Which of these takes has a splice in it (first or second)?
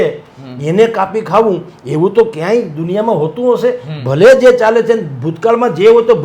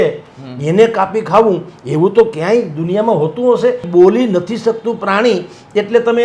second